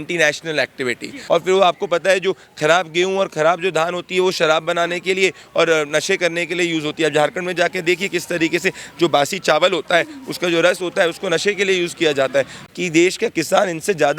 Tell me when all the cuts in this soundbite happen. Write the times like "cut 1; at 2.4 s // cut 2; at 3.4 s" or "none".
cut 1; at 1.2 s // cut 2; at 12.6 s